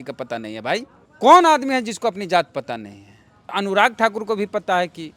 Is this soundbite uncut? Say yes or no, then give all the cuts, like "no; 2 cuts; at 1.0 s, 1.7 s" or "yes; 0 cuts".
no; 2 cuts; at 1.0 s, 3.5 s